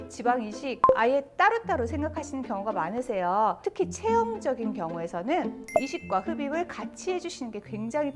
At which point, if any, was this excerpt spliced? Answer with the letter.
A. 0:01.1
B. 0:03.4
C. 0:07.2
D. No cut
D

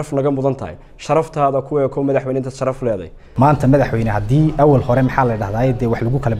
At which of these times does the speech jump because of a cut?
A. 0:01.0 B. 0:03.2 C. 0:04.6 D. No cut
B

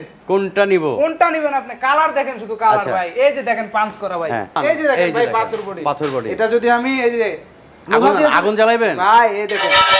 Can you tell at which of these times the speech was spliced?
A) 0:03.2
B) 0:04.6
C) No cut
B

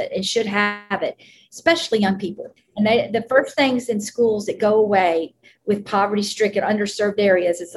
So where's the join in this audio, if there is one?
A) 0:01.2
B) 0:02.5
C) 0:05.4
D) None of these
B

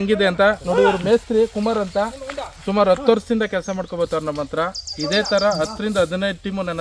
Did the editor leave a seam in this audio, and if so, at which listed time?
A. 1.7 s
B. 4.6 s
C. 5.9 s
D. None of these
D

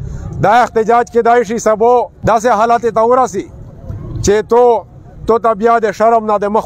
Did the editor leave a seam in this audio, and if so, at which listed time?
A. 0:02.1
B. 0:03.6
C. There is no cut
A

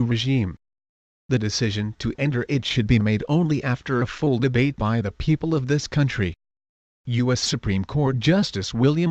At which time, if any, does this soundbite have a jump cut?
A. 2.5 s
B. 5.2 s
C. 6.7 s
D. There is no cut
D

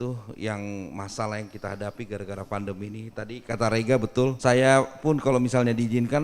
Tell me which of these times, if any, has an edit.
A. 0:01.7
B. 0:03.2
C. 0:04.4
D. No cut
C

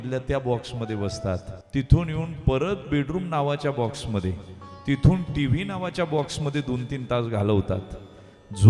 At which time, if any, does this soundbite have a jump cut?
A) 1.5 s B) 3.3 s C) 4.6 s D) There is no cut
A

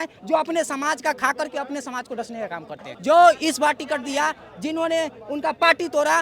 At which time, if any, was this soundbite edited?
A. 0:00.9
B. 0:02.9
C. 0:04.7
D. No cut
B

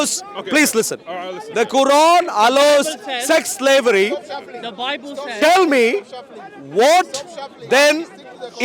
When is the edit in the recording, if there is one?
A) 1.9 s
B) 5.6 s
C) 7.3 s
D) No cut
D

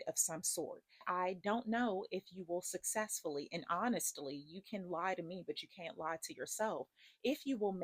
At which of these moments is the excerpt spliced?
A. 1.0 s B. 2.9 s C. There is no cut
A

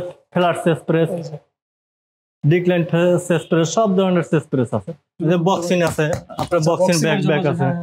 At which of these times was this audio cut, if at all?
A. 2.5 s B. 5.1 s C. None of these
B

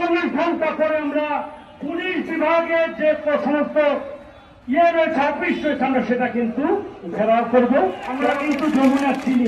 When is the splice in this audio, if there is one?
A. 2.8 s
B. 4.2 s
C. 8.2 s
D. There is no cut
C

